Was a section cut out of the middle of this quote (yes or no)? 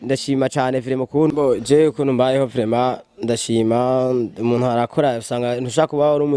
yes